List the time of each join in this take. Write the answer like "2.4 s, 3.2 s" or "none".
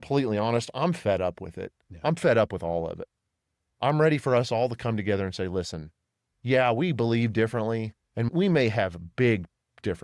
none